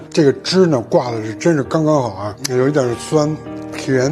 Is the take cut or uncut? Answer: uncut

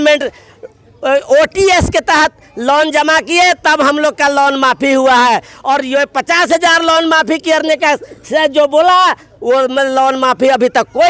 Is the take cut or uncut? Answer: uncut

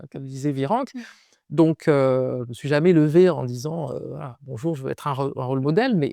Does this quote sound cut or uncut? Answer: uncut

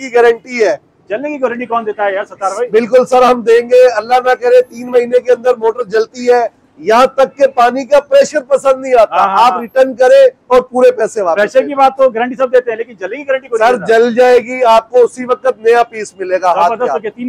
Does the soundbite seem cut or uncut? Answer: uncut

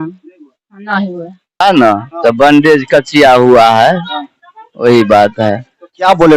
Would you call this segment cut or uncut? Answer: cut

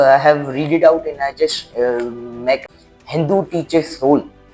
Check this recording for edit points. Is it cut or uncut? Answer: cut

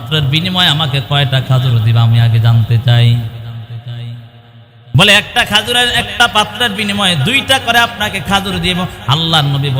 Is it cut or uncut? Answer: uncut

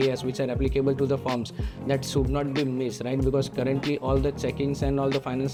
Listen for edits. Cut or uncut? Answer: uncut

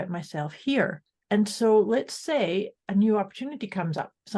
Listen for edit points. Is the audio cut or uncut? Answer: cut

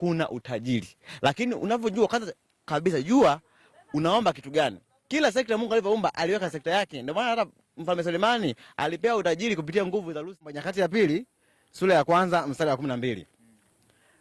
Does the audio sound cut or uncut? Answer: cut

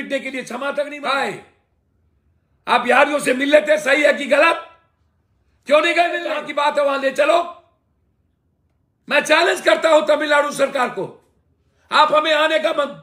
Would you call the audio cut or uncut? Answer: cut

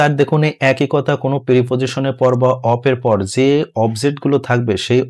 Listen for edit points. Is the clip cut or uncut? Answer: uncut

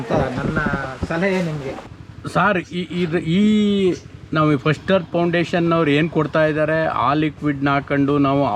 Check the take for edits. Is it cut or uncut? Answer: cut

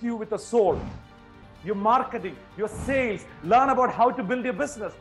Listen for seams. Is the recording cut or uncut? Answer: cut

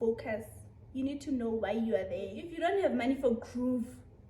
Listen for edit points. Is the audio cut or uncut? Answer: cut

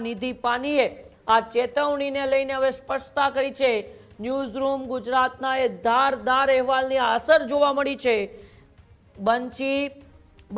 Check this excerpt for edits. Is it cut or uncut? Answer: uncut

